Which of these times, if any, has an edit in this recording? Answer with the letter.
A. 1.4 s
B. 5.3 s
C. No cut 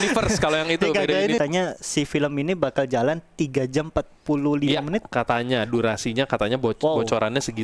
A